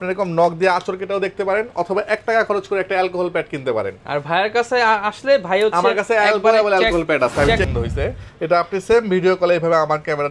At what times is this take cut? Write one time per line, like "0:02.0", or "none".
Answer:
0:07.7